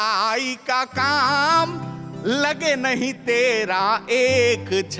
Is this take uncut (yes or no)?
yes